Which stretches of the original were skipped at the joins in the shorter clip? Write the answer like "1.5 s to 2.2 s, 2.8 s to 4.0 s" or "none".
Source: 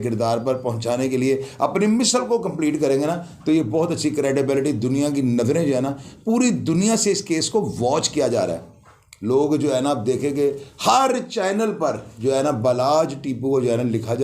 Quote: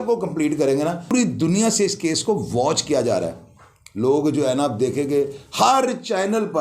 3.3 s to 6.4 s